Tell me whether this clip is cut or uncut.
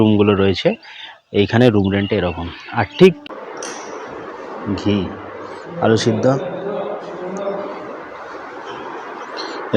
cut